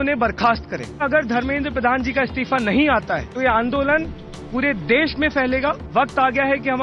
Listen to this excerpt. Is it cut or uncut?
cut